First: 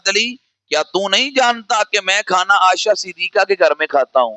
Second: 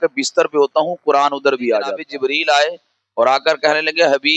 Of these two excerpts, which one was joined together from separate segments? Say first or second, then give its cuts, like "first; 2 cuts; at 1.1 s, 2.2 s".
second; 1 cut; at 2.1 s